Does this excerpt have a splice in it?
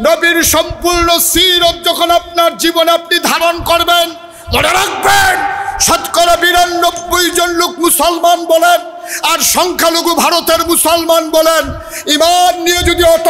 no; 0 cuts

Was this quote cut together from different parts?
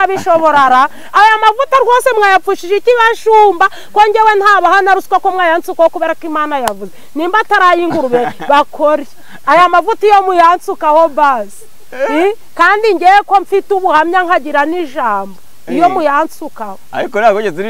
no; 0 cuts

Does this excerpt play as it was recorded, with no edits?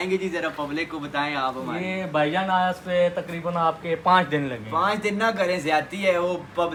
yes; 0 cuts

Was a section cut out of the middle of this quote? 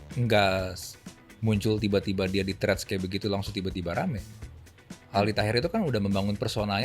no; 0 cuts

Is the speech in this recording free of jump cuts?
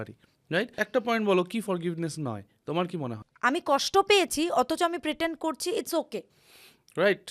no; 2 cuts; at 0.8 s, 3.2 s

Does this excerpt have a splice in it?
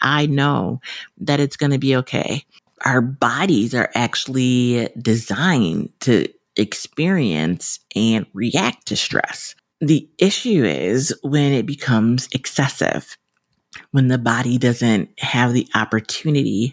yes; 1 cut; at 2.7 s

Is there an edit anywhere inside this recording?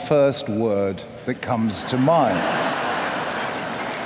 yes; 1 cut; at 2.7 s

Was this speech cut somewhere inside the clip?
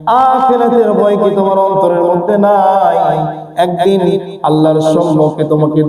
no; 0 cuts

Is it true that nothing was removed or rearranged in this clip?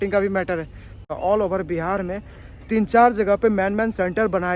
no; 1 cut; at 1.1 s

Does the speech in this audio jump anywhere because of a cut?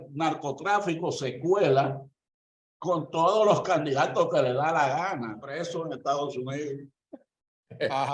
yes; 1 cut; at 5.5 s

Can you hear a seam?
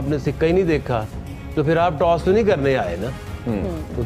no; 0 cuts

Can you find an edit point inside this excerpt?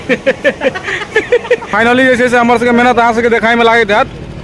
yes; 1 cut; at 1.7 s

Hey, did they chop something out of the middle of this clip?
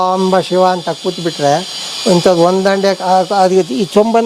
no; 0 cuts

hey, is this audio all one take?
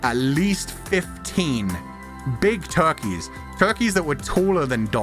yes; 0 cuts

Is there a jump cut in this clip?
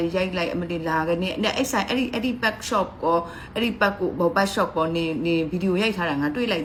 no; 0 cuts

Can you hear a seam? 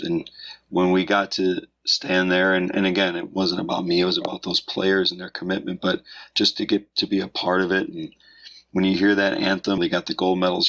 yes; 1 cut; at 9.8 s

